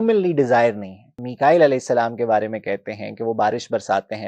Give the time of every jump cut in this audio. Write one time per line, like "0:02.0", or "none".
0:01.2